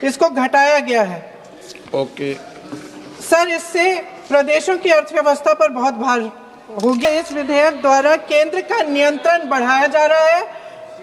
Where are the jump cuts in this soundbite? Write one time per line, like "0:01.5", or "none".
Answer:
0:07.0